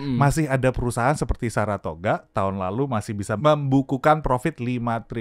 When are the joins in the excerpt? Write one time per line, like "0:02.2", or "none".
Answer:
0:03.4